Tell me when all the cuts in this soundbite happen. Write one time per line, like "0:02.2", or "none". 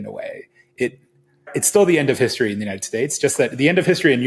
0:01.5